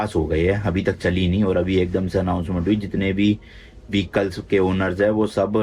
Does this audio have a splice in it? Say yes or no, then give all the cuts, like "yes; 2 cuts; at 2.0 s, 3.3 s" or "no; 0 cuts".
no; 0 cuts